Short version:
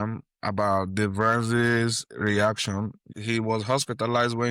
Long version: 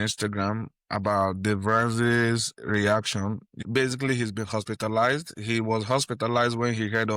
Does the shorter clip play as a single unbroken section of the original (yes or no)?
no